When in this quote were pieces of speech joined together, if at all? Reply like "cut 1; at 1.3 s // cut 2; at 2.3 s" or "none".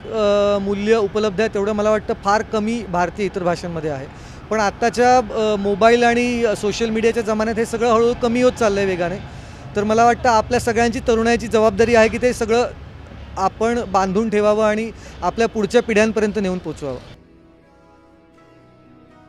none